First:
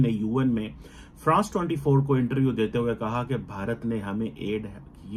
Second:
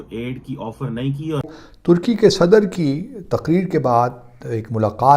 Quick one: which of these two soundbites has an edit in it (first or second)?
second